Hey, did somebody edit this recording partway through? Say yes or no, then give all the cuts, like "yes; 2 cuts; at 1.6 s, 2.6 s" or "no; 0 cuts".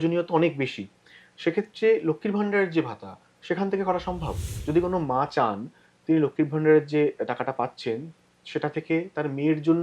yes; 1 cut; at 4.5 s